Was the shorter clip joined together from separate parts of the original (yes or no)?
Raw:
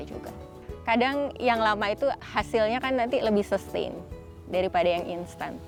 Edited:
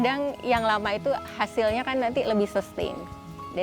no